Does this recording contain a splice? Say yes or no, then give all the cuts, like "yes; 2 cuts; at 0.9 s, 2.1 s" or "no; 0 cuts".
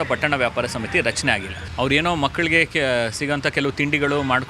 yes; 1 cut; at 1.6 s